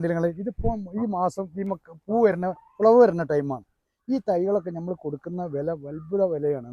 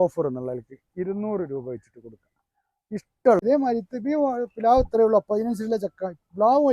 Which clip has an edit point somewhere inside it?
second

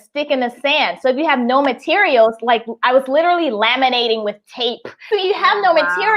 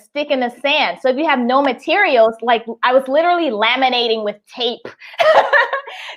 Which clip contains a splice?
first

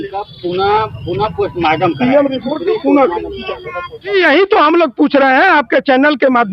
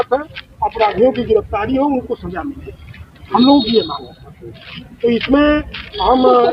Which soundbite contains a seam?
first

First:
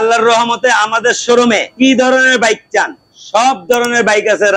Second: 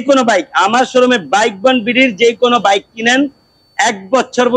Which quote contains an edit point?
first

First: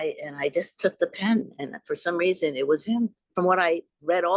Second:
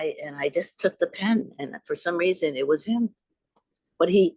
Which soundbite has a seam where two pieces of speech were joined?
first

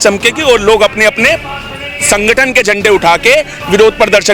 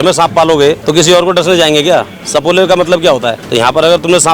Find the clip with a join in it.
second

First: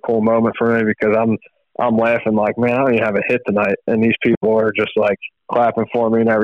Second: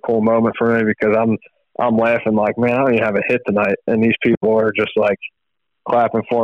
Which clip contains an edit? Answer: first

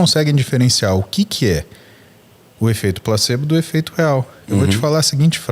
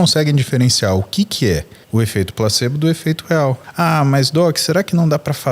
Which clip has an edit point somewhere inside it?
second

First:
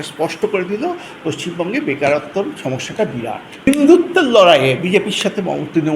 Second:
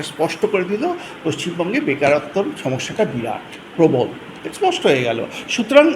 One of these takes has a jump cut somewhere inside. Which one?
first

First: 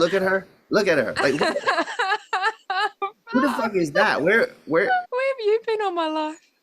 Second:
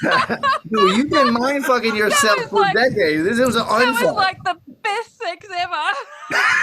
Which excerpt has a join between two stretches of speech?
first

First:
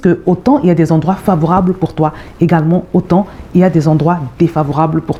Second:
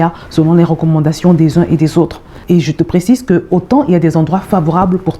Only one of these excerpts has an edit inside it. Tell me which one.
second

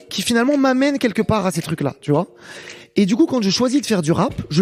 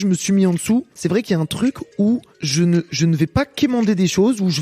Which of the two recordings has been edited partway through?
second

